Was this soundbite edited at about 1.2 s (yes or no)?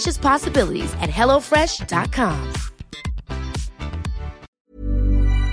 no